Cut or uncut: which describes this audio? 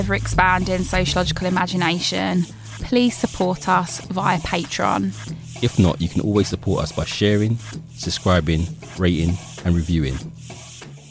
cut